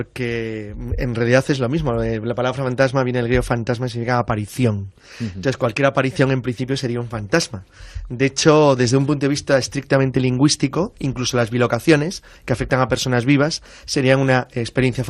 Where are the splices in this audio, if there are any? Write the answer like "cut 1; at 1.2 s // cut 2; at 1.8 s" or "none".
cut 1; at 0.9 s